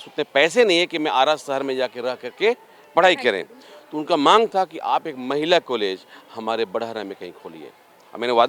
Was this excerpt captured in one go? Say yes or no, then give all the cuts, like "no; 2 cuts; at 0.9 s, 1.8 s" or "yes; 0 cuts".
yes; 0 cuts